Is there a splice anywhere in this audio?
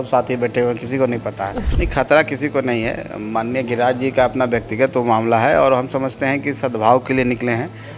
yes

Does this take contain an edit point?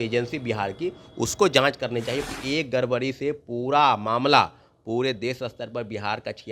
yes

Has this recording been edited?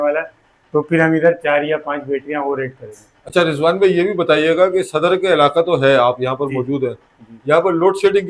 no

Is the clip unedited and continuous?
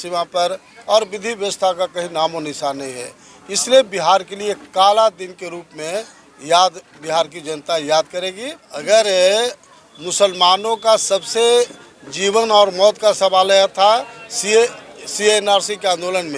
no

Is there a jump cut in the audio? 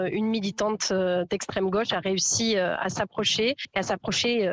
no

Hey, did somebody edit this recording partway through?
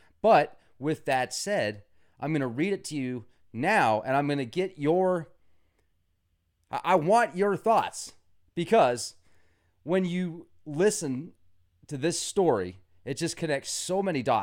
yes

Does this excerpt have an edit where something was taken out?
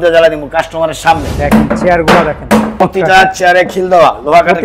yes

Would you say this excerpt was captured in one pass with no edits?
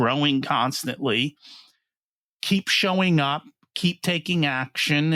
yes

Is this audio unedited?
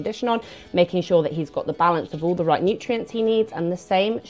yes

